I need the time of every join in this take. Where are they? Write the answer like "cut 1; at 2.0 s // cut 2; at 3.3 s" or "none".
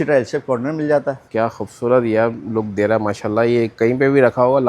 cut 1; at 1.2 s